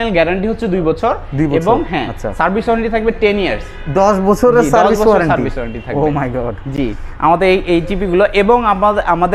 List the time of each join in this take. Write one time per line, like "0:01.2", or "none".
none